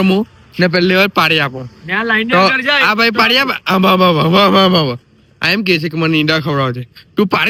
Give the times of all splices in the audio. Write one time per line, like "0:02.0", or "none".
none